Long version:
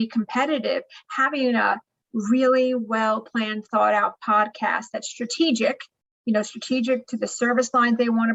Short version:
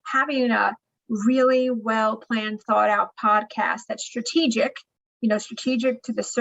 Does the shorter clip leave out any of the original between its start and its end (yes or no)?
no